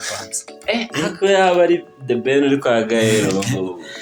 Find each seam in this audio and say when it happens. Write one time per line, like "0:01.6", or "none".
none